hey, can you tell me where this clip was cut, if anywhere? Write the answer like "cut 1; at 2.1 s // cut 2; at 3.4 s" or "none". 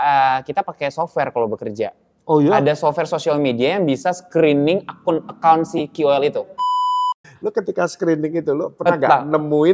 cut 1; at 6.9 s